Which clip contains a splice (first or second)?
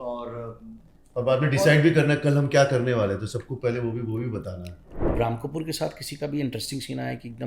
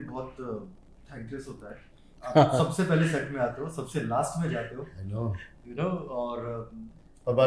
first